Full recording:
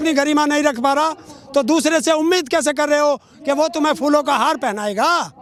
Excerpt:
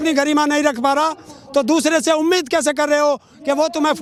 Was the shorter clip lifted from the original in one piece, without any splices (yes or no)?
yes